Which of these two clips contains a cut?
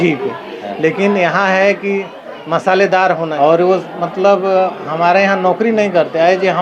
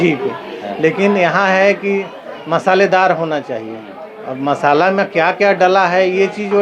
first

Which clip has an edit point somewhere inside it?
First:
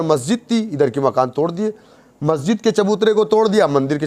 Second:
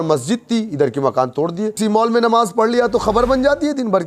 second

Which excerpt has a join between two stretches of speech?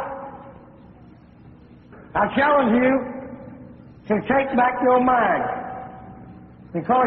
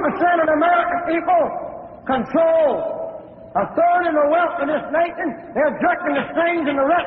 first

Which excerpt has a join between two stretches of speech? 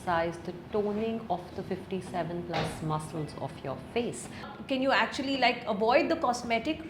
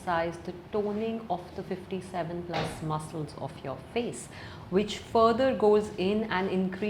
first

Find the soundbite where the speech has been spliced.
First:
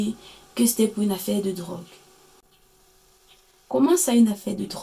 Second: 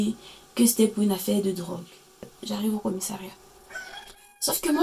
second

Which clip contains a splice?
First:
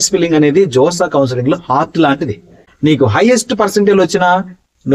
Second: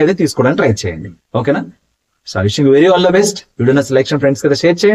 first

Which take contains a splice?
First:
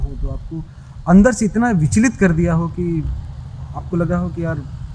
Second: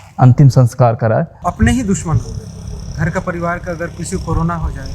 second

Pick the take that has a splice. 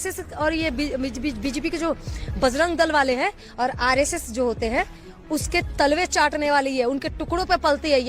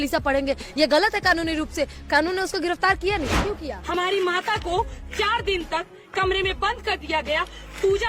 second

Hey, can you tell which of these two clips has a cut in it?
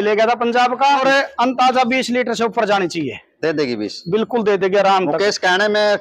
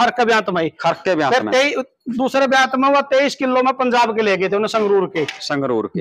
first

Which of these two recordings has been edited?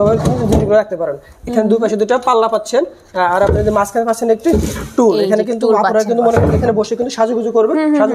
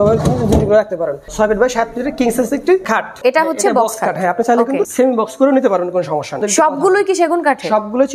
second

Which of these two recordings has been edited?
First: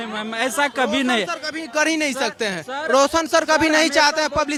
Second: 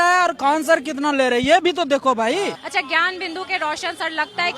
second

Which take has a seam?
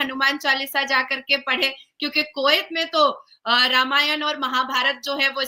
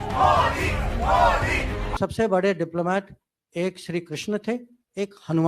second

